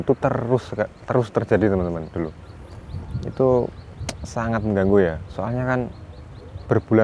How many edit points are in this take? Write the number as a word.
zero